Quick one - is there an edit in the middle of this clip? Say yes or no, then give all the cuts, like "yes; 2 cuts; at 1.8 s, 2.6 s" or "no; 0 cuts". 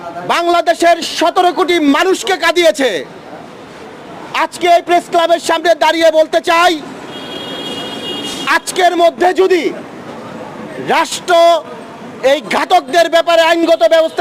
no; 0 cuts